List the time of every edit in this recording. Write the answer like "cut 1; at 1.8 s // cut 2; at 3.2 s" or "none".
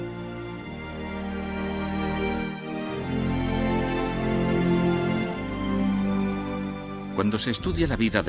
cut 1; at 4.3 s